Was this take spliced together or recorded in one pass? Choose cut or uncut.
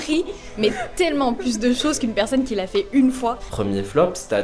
cut